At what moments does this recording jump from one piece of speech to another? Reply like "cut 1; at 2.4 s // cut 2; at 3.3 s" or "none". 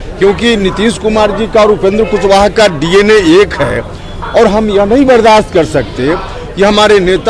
none